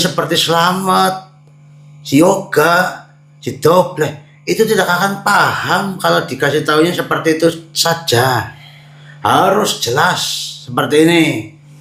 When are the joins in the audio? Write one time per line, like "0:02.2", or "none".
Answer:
none